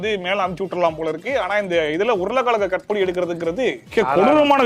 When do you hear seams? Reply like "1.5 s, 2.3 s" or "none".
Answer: none